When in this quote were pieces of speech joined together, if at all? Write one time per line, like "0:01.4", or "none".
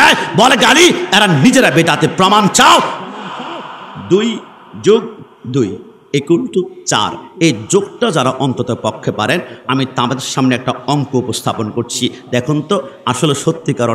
none